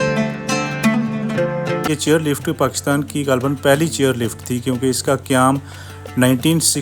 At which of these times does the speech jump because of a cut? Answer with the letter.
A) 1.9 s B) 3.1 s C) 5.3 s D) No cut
A